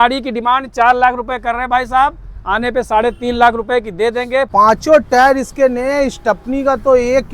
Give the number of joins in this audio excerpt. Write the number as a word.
one